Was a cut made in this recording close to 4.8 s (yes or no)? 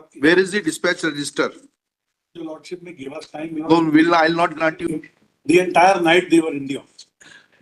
yes